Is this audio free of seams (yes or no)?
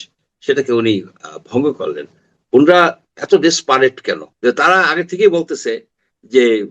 no